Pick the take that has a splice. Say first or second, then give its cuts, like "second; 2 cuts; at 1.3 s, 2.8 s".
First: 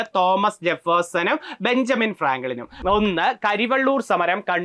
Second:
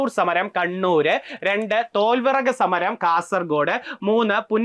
first; 1 cut; at 2.7 s